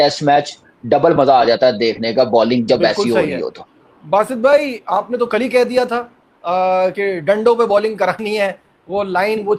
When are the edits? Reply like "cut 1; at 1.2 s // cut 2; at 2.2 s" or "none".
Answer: none